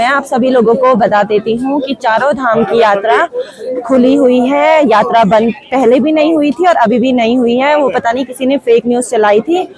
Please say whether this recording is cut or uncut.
uncut